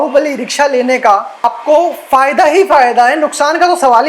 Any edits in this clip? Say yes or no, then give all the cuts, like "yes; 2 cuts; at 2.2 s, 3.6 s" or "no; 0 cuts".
yes; 1 cut; at 1.4 s